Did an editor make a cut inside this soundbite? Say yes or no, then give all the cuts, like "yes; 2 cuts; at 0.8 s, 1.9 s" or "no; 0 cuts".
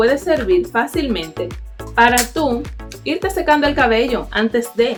no; 0 cuts